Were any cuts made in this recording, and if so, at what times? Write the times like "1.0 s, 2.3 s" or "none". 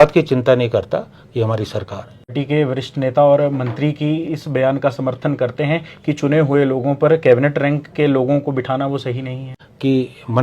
2.4 s, 9.5 s